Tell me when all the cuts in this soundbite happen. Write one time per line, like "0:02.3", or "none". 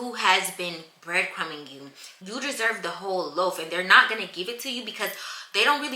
0:02.0